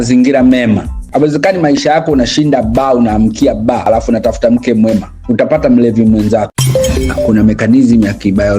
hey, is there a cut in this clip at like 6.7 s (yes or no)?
yes